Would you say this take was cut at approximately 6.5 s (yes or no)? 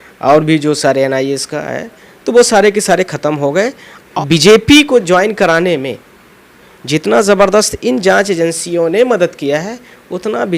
no